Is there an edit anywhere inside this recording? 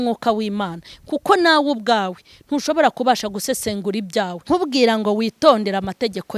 yes; 1 cut; at 4.4 s

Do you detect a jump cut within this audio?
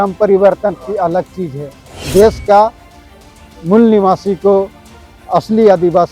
yes; 1 cut; at 1.9 s

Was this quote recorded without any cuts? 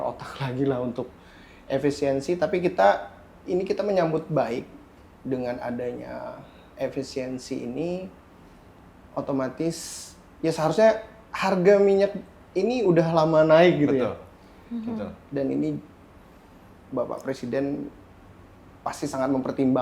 yes; 0 cuts

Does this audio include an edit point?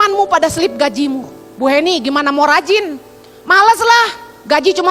no; 0 cuts

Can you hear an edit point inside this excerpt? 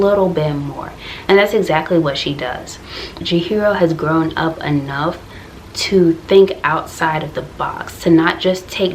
yes; 1 cut; at 3.1 s

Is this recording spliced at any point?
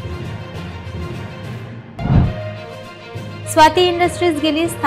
yes; 1 cut; at 1.2 s

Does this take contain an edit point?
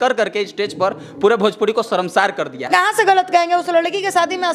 yes; 1 cut; at 2.7 s

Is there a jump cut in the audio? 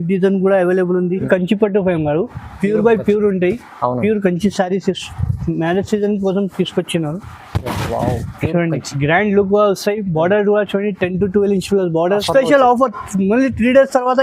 yes; 2 cuts; at 1.2 s, 12.1 s

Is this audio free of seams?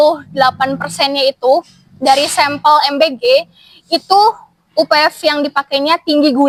yes; 0 cuts

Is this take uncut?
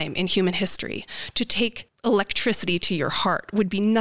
no; 1 cut; at 1.9 s

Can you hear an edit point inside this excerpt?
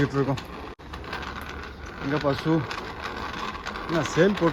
no; 0 cuts

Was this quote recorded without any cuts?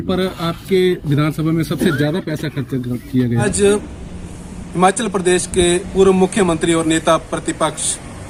yes; 0 cuts

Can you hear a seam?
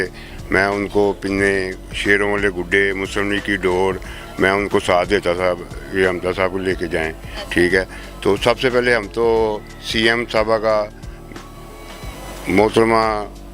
no; 0 cuts

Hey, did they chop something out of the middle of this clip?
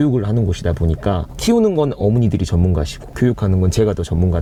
no; 0 cuts

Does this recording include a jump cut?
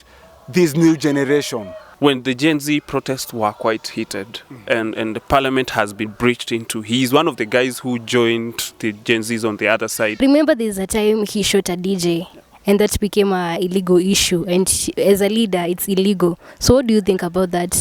yes; 2 cuts; at 1.8 s, 10.2 s

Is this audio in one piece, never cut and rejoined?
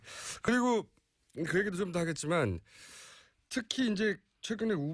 no; 1 cut; at 3.9 s

